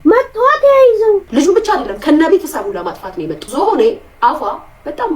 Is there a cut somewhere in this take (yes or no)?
yes